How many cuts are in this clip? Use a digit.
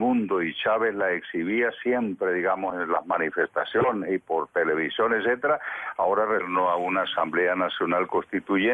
0